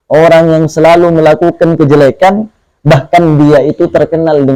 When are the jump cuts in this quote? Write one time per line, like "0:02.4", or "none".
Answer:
none